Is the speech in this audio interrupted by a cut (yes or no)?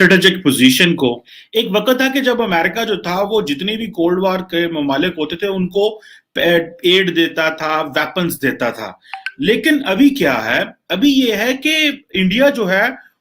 yes